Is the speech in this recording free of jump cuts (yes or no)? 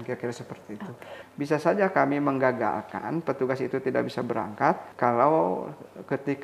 no